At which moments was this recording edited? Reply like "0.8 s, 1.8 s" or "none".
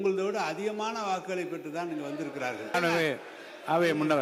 2.7 s

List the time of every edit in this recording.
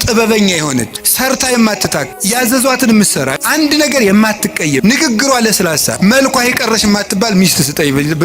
1.0 s, 2.1 s, 3.4 s, 4.8 s, 6.0 s

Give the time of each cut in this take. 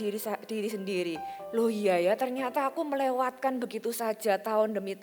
1.3 s

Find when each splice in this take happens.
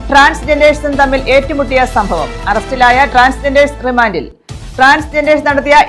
none

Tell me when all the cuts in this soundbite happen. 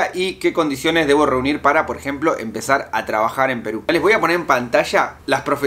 3.9 s

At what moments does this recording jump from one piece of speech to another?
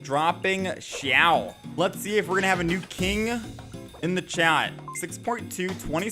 1.6 s

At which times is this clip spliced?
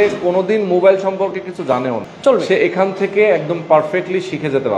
2.1 s

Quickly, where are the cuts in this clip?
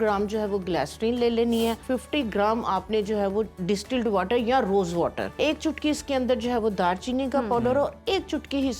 1.8 s, 5.2 s

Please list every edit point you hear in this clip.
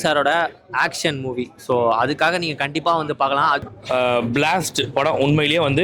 3.7 s

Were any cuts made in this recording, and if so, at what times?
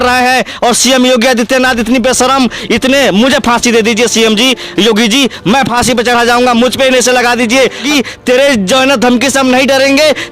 7.9 s

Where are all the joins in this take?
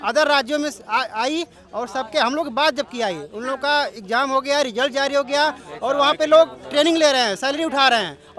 none

